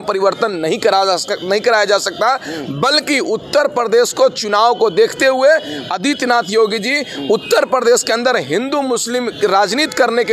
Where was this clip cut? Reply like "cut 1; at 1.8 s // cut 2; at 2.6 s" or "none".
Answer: none